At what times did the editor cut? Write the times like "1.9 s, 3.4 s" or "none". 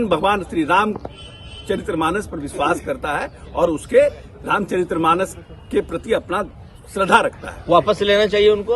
none